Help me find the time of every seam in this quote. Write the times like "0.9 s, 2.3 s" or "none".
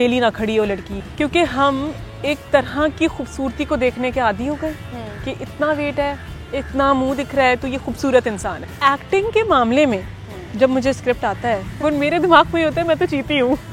1.0 s, 8.6 s, 11.7 s